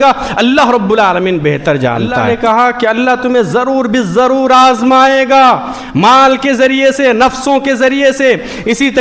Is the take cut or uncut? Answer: cut